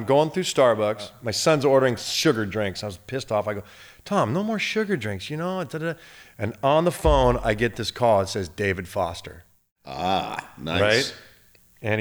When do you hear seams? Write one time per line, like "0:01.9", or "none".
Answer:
0:01.2